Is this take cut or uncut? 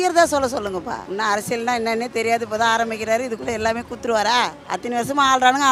uncut